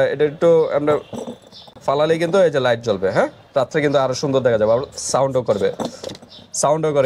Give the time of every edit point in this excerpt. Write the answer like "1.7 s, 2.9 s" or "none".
none